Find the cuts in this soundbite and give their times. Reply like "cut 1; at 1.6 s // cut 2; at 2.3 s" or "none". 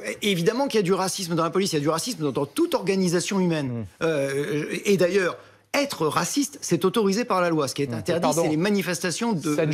none